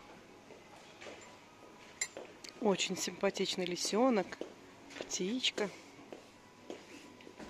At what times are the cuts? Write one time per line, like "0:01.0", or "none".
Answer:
none